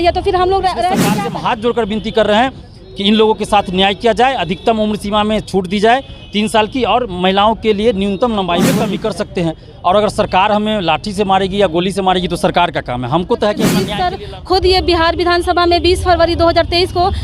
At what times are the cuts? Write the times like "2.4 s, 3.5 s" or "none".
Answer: 1.1 s, 8.9 s, 14.0 s